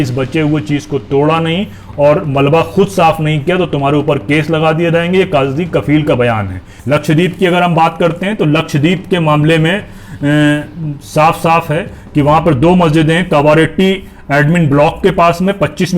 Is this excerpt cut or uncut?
cut